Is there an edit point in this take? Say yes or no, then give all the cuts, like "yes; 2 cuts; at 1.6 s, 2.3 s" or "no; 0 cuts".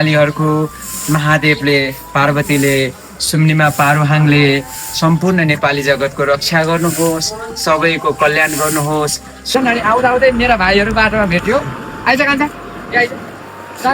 yes; 1 cut; at 9.5 s